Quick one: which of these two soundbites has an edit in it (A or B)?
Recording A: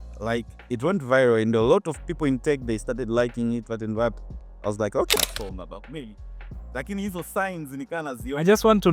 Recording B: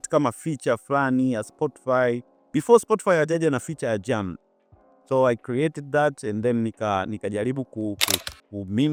A